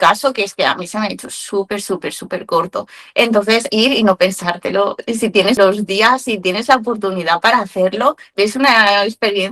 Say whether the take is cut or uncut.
cut